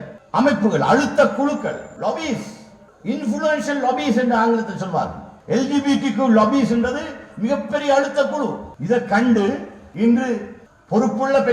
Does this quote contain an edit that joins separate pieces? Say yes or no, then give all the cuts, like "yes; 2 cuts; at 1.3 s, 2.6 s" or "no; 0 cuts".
yes; 1 cut; at 8.7 s